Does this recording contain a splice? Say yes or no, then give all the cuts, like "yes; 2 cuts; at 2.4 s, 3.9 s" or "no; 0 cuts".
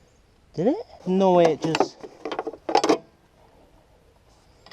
yes; 1 cut; at 0.9 s